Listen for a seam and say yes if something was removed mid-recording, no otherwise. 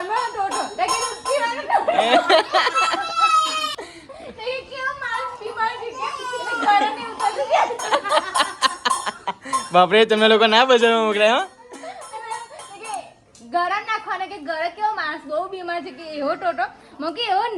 yes